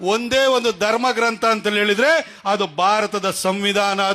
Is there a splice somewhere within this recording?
no; 0 cuts

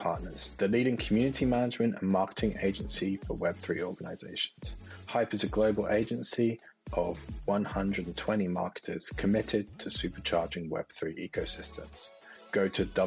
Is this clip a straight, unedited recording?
yes; 0 cuts

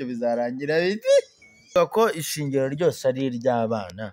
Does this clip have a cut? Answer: yes; 1 cut; at 1.7 s

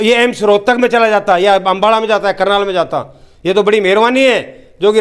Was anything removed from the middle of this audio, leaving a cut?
no; 0 cuts

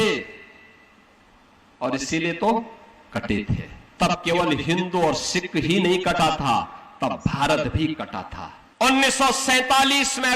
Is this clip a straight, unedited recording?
no; 2 cuts; at 3.8 s, 8.7 s

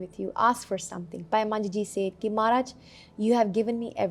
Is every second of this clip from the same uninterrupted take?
yes; 0 cuts

